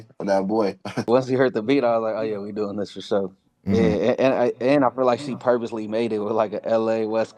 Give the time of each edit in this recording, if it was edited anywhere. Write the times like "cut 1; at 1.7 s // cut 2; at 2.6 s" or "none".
cut 1; at 1.1 s